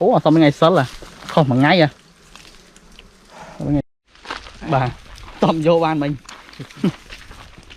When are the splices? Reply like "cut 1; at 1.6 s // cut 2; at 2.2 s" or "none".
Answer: cut 1; at 3.9 s